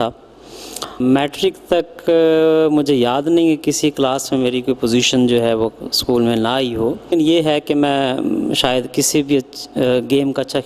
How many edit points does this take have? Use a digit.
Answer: 0